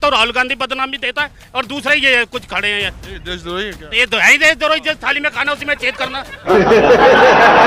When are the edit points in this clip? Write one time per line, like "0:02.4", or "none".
none